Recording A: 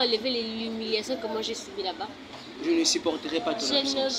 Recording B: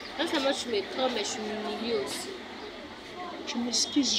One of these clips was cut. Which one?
A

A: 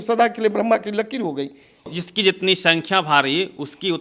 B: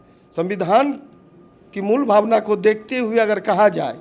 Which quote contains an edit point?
A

